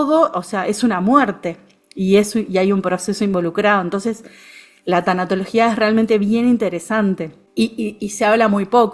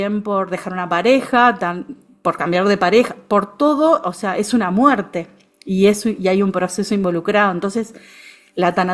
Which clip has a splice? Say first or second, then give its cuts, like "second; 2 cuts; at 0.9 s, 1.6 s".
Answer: first; 1 cut; at 7.4 s